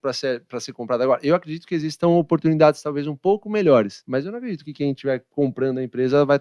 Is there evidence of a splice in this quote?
no; 0 cuts

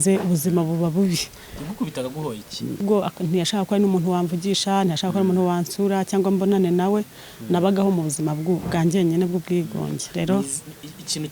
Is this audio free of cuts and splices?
no; 1 cut; at 2.8 s

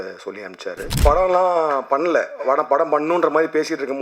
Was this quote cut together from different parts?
yes; 1 cut; at 1.0 s

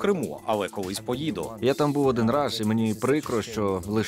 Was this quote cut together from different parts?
no; 0 cuts

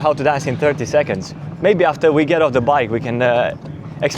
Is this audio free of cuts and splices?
yes; 0 cuts

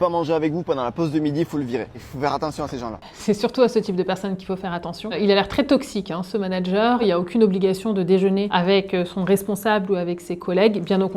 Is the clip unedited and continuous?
no; 4 cuts; at 2.0 s, 3.1 s, 7.0 s, 8.5 s

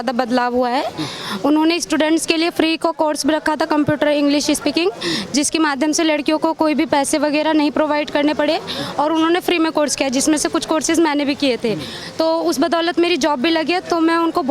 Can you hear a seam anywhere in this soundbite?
no; 0 cuts

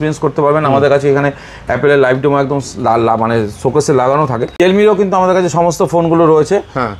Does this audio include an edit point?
no; 0 cuts

